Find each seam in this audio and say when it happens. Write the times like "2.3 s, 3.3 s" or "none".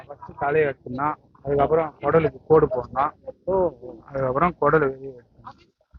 none